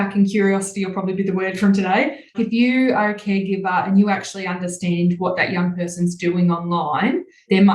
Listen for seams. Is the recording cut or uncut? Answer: cut